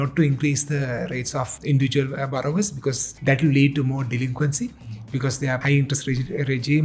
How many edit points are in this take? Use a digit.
3